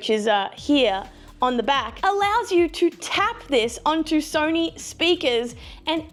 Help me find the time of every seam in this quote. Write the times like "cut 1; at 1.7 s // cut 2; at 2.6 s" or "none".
none